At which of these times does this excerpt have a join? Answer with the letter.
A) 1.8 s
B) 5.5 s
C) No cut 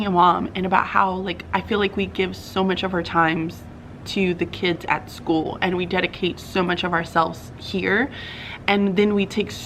C